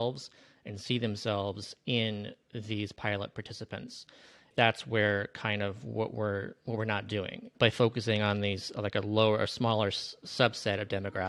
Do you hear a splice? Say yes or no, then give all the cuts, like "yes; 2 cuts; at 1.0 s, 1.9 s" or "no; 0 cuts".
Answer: yes; 2 cuts; at 4.5 s, 7.5 s